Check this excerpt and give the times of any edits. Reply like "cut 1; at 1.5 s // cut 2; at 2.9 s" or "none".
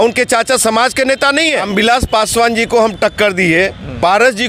cut 1; at 1.7 s